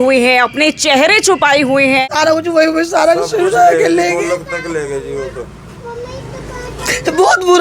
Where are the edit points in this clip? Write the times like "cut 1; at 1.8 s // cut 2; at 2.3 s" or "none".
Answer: cut 1; at 2.0 s